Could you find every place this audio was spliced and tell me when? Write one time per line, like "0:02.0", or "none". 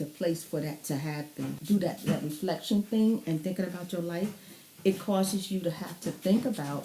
0:01.6